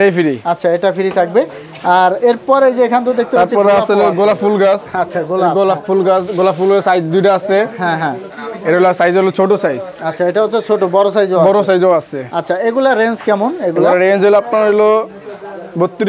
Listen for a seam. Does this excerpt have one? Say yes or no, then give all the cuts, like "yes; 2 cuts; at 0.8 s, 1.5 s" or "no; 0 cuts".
no; 0 cuts